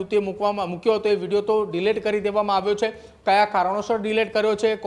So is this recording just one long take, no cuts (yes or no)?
yes